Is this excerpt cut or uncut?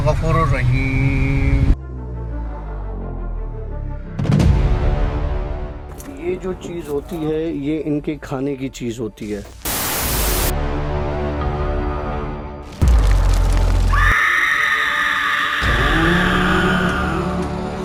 uncut